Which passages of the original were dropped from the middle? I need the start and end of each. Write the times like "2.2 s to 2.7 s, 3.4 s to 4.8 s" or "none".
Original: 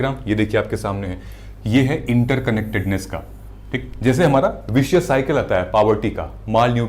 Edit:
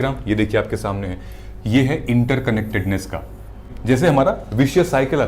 3.7 s to 3.8 s